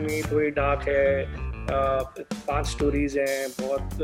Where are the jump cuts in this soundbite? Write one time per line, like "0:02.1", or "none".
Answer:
none